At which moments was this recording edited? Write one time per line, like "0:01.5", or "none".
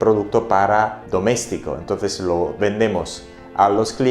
none